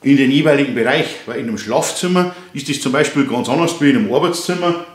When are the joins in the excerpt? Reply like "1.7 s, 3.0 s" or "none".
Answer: none